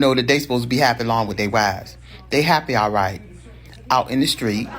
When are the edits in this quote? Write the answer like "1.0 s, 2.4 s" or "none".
1.8 s